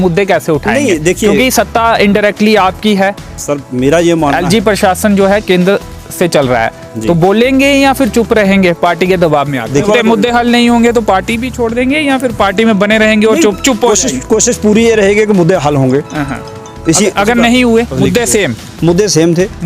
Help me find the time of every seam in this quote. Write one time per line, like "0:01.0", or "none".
0:09.8
0:17.9